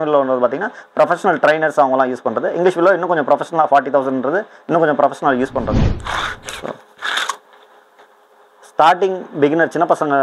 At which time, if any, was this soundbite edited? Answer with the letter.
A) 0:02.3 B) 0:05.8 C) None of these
B